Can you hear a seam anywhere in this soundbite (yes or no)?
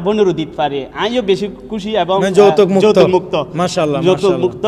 no